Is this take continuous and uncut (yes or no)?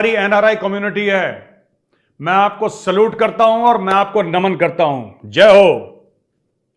yes